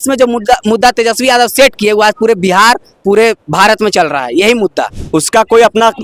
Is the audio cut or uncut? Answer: cut